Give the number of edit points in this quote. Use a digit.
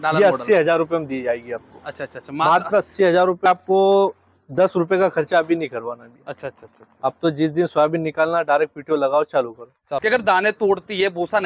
2